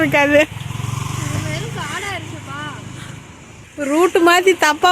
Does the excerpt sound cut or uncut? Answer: cut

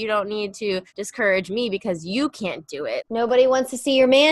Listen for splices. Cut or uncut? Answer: cut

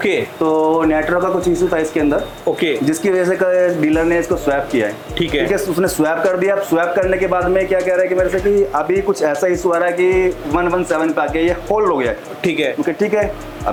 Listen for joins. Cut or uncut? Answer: uncut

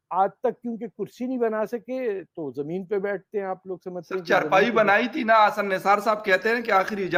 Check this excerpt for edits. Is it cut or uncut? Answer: uncut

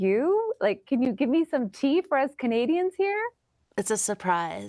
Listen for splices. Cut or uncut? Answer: uncut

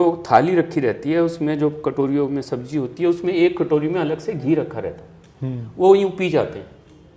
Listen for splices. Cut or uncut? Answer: uncut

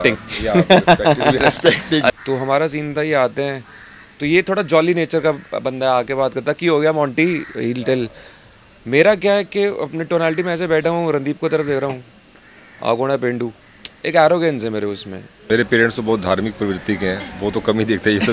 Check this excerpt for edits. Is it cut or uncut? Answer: cut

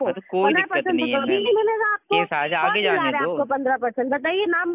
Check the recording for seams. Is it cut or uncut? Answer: uncut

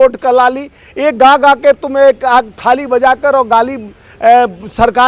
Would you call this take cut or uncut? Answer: uncut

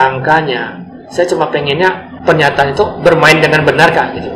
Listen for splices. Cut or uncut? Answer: cut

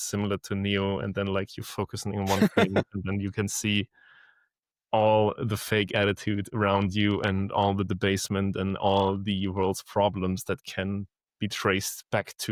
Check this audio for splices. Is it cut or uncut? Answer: uncut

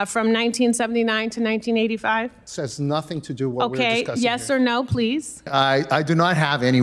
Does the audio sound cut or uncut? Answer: cut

